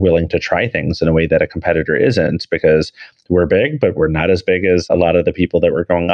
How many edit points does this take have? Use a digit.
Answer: 1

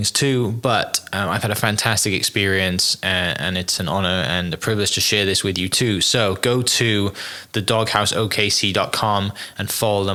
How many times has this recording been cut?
0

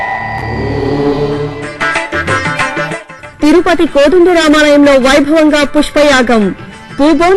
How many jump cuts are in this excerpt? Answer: 1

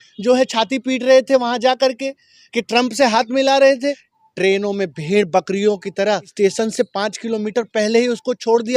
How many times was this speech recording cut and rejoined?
2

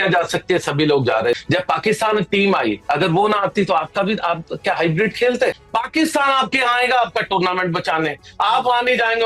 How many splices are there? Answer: 2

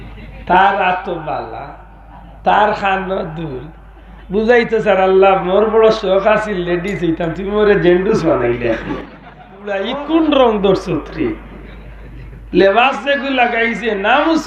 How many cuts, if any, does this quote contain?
1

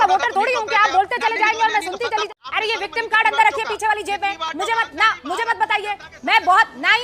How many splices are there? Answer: 2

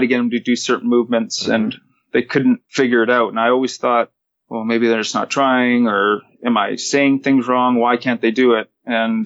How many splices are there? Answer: 1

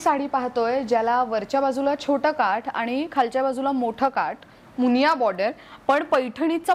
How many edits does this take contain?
0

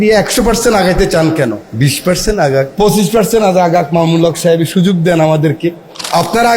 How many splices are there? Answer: 2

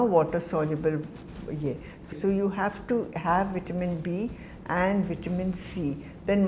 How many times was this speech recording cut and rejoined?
1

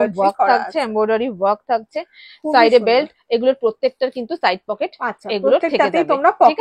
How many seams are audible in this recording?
0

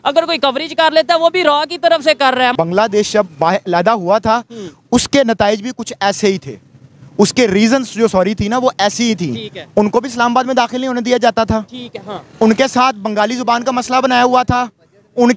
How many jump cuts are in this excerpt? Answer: 1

